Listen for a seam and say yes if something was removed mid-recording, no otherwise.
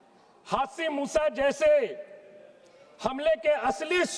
no